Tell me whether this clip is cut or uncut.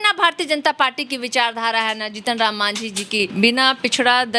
cut